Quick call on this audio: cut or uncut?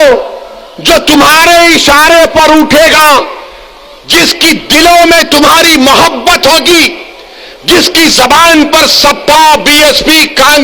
uncut